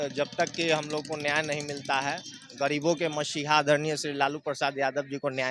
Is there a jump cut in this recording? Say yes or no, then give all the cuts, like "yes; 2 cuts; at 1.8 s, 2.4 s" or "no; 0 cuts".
no; 0 cuts